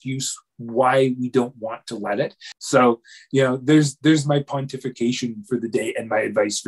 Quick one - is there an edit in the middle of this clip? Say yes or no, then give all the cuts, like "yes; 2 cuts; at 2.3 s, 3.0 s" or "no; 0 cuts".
yes; 1 cut; at 2.5 s